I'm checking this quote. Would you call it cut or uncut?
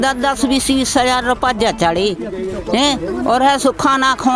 uncut